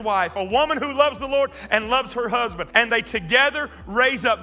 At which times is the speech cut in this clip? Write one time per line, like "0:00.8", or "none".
0:02.6